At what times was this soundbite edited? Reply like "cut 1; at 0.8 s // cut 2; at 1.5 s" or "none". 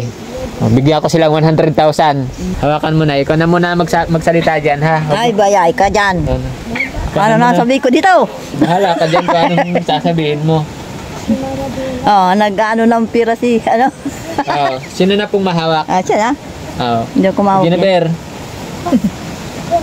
cut 1; at 2.4 s